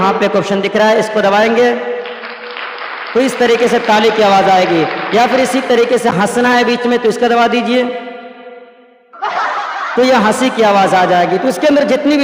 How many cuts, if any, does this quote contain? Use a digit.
0